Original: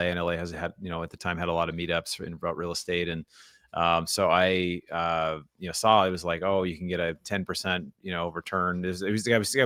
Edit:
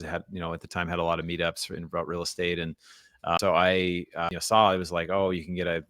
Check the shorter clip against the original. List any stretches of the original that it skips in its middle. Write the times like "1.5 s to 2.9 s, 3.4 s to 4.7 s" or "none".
3.9 s to 4.1 s, 5.0 s to 5.5 s

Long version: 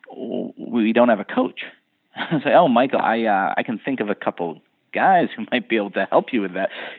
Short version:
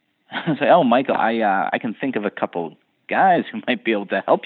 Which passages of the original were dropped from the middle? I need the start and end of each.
none

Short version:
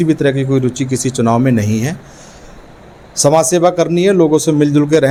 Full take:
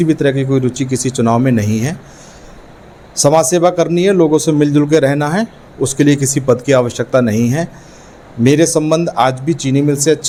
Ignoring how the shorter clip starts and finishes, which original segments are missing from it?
none

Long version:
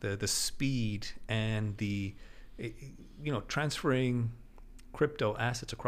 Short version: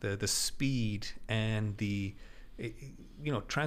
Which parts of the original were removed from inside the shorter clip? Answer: none

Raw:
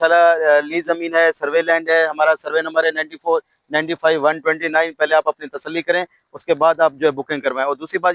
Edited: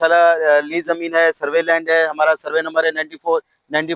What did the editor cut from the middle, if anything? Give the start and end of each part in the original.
none

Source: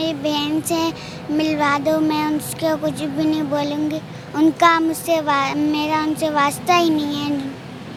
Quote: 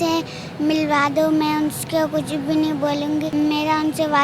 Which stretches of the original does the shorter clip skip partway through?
4.0 s to 5.5 s

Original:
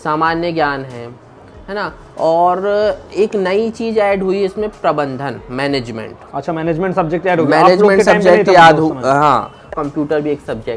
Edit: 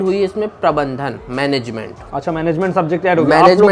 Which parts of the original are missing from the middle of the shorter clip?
none

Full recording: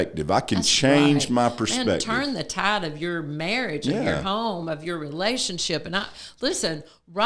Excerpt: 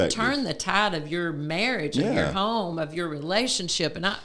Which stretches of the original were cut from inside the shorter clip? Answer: none

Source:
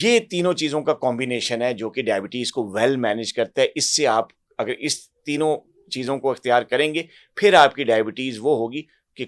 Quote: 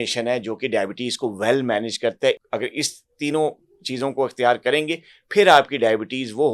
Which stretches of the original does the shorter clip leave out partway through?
3.8 s to 4.5 s

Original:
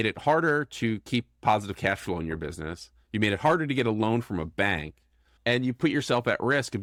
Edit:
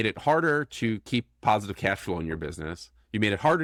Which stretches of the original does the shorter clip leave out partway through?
none

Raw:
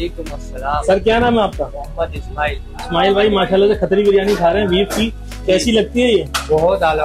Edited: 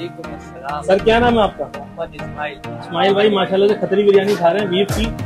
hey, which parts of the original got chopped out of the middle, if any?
none

